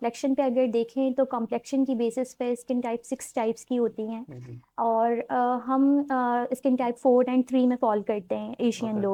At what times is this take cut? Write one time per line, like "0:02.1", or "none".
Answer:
none